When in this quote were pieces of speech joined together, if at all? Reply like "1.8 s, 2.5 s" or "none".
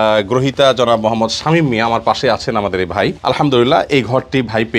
3.2 s